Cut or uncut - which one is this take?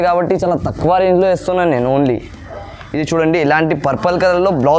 uncut